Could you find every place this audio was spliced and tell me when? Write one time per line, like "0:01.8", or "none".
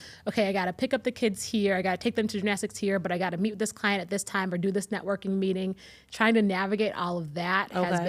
none